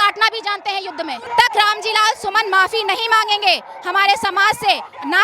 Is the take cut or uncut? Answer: cut